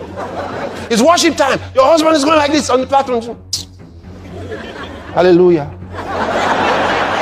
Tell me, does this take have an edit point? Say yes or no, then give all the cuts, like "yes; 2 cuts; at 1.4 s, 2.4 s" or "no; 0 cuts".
no; 0 cuts